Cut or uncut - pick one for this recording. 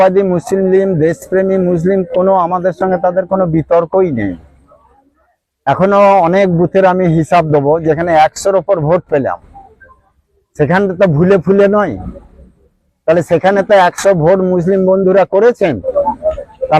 uncut